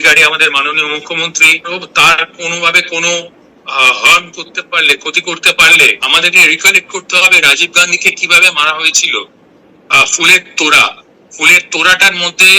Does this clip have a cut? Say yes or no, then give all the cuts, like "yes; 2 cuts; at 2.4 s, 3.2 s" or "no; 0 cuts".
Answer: yes; 2 cuts; at 1.7 s, 6.0 s